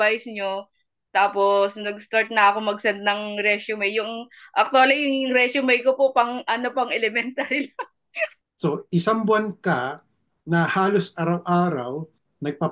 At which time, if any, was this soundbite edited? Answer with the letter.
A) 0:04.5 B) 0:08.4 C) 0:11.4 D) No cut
B